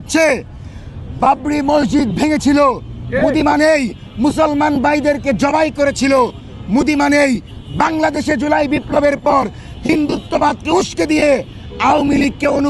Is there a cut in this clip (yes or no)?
no